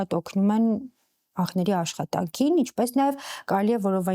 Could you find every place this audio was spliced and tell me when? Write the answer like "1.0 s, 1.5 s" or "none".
none